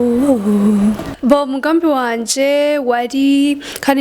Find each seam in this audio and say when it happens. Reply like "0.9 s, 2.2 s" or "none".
1.1 s